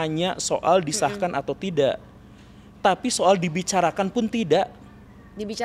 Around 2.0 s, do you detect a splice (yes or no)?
no